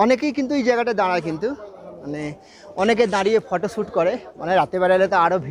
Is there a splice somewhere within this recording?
no; 0 cuts

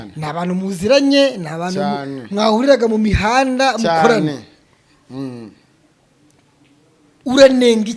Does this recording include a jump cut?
no; 0 cuts

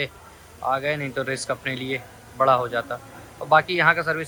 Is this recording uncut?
yes; 0 cuts

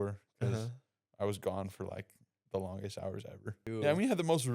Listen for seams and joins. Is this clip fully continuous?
no; 1 cut; at 3.6 s

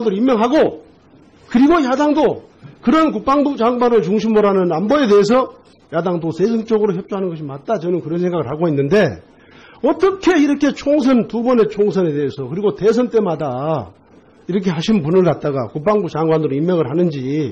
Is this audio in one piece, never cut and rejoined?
no; 1 cut; at 5.6 s

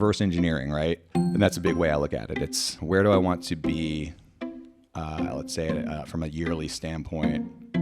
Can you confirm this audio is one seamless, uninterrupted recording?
no; 2 cuts; at 1.1 s, 2.8 s

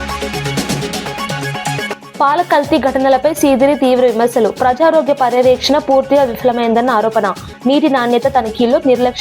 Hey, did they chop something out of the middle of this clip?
yes; 1 cut; at 1.4 s

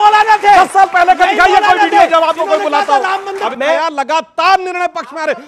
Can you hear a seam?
yes; 1 cut; at 3.8 s

